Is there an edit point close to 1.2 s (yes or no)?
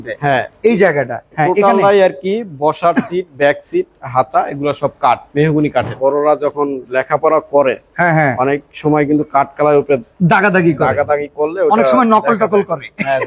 yes